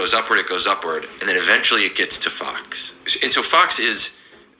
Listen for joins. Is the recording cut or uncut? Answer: cut